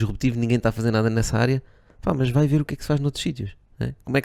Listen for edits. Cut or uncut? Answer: uncut